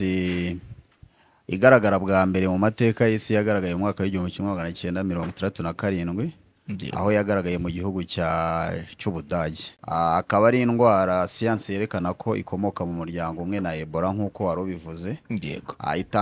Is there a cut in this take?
yes; 1 cut; at 9.7 s

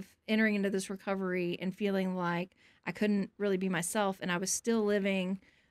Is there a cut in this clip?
no; 0 cuts

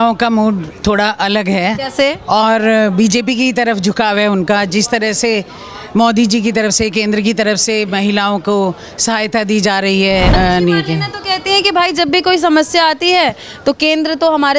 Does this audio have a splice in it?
yes; 1 cut; at 10.3 s

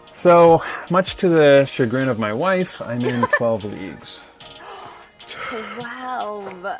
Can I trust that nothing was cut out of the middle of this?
yes; 0 cuts

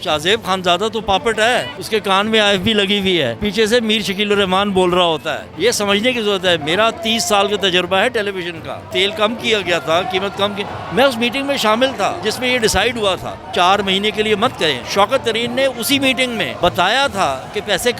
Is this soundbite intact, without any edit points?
no; 8 cuts; at 1.8 s, 3.4 s, 5.4 s, 8.9 s, 12.2 s, 13.4 s, 14.8 s, 16.5 s

